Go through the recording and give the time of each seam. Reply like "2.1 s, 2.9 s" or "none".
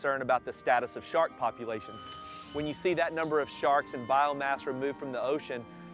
2.4 s